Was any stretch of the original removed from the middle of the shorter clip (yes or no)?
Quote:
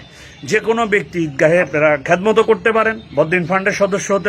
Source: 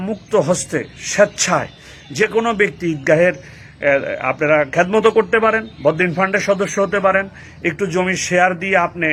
yes